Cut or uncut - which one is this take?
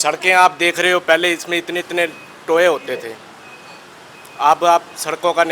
uncut